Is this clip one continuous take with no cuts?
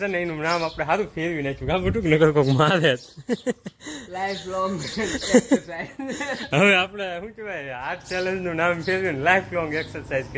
yes; 0 cuts

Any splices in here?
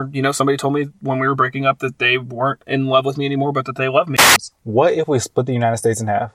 yes; 1 cut; at 4.2 s

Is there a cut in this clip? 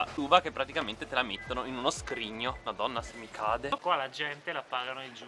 yes; 1 cut; at 3.7 s

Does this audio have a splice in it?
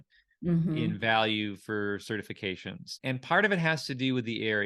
yes; 1 cut; at 2.9 s

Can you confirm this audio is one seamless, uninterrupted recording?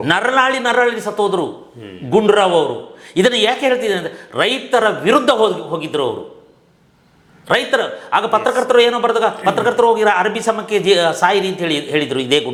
yes; 0 cuts

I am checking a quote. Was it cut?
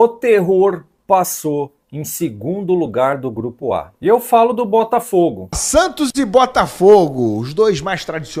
yes; 1 cut; at 5.5 s

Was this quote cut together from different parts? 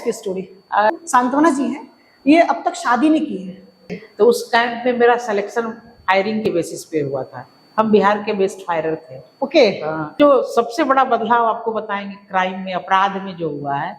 yes; 3 cuts; at 0.9 s, 4.0 s, 10.1 s

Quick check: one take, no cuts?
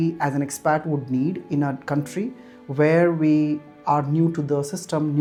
yes; 0 cuts

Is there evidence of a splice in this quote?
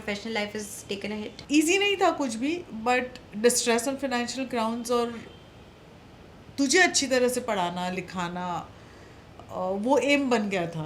yes; 1 cut; at 1.4 s

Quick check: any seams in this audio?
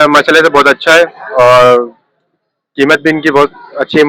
no; 0 cuts

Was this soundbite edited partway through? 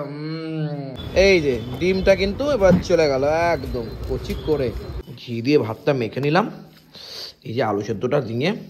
yes; 2 cuts; at 1.0 s, 5.2 s

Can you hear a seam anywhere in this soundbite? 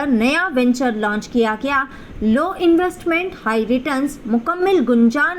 no; 0 cuts

